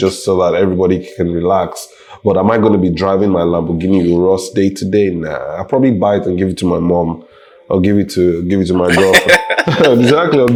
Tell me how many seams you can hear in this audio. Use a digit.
0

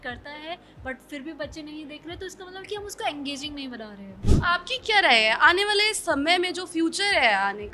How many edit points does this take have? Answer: 1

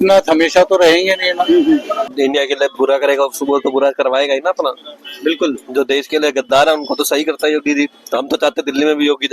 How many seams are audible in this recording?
1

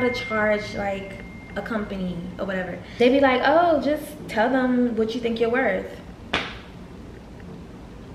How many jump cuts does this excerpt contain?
1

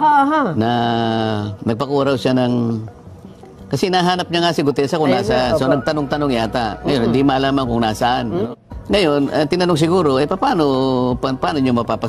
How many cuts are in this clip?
1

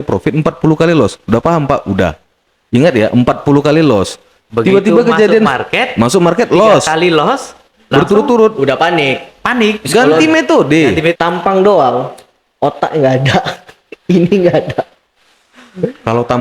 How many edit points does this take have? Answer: 1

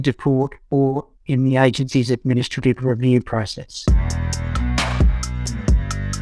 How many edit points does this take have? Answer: 1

